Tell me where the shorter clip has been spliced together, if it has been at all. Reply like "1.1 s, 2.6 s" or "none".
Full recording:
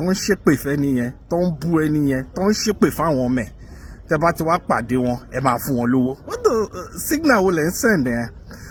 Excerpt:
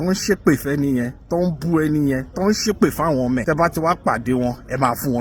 3.4 s